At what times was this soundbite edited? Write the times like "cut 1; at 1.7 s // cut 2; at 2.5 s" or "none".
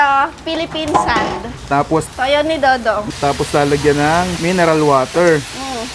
cut 1; at 2.1 s // cut 2; at 3.0 s // cut 3; at 4.4 s